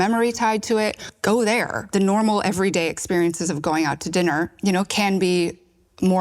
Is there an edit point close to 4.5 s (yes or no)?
yes